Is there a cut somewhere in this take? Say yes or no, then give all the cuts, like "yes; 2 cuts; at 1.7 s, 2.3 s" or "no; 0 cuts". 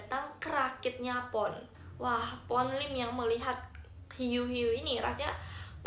no; 0 cuts